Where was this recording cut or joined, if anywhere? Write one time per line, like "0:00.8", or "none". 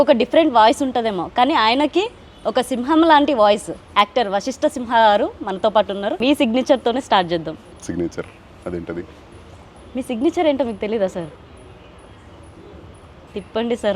0:03.8
0:06.2